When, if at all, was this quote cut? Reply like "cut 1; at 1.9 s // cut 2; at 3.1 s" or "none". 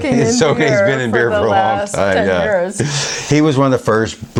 none